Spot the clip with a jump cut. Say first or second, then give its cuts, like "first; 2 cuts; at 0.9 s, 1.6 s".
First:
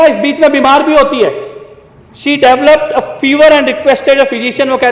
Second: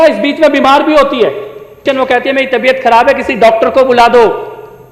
second; 1 cut; at 1.7 s